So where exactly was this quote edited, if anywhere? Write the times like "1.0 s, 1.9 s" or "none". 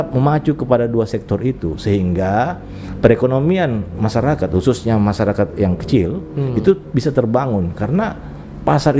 none